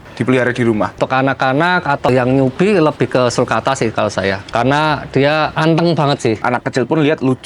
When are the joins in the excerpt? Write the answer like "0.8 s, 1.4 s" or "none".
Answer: 1.0 s, 2.1 s, 4.4 s, 5.5 s, 6.4 s